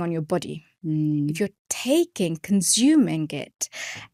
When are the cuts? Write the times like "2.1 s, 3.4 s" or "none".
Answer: none